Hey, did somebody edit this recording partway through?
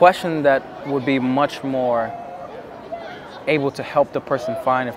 no; 0 cuts

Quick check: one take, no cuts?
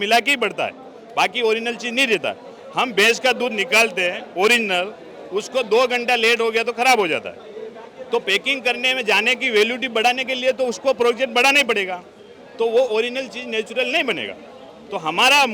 yes; 0 cuts

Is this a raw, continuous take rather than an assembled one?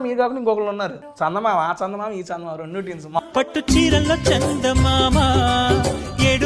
no; 2 cuts; at 1.0 s, 3.2 s

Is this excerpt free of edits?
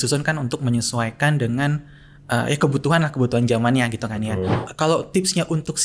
no; 1 cut; at 4.6 s

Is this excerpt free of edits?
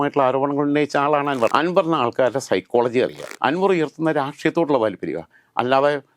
no; 2 cuts; at 1.5 s, 3.2 s

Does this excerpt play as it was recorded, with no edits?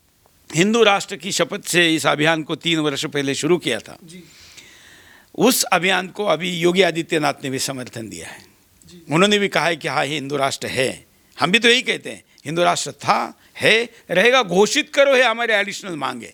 yes; 0 cuts

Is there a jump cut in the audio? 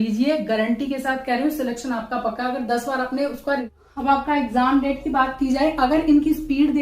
yes; 1 cut; at 3.7 s

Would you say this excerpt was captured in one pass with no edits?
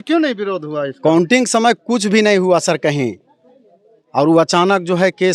yes; 0 cuts

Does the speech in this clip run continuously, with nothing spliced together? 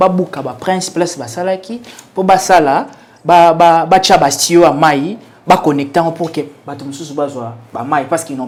yes; 0 cuts

